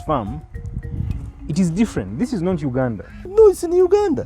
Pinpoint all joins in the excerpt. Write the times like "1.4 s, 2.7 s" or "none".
3.3 s